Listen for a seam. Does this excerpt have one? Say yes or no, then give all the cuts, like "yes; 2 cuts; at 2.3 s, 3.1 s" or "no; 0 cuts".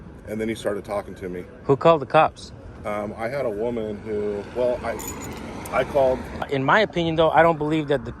yes; 1 cut; at 6.5 s